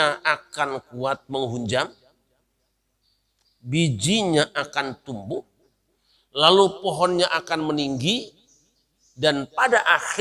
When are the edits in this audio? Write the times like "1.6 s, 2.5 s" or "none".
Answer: none